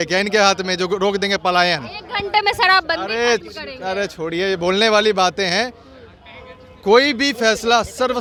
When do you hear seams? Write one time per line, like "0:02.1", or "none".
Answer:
none